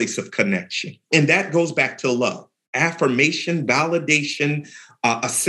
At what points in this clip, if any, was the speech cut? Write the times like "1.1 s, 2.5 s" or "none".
1.1 s

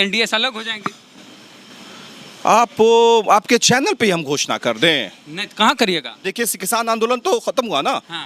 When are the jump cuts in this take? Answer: 6.2 s

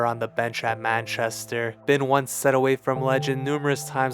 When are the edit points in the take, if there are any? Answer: 1.8 s

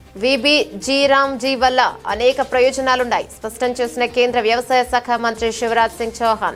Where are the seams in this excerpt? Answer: none

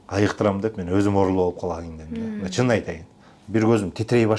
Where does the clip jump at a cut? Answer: none

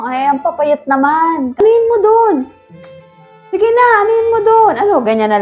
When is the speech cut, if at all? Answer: 1.6 s

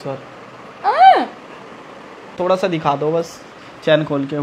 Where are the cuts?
2.4 s

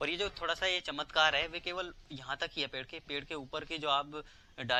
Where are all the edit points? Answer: none

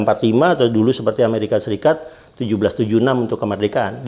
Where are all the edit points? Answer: none

